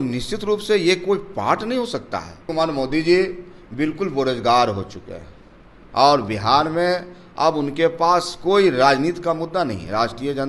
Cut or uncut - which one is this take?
cut